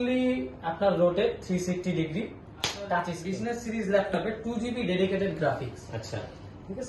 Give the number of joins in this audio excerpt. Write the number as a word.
one